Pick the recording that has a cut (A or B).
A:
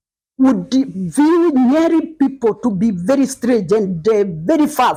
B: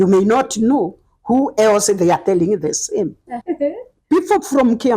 B